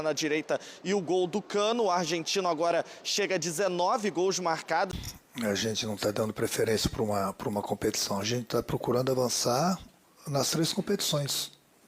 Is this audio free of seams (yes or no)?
no